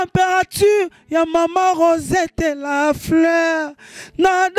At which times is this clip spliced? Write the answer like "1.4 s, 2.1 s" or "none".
none